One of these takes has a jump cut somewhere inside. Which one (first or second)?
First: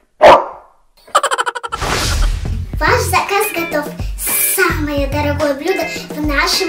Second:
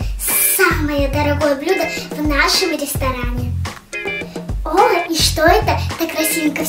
first